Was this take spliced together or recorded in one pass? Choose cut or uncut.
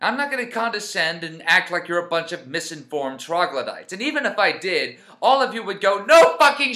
uncut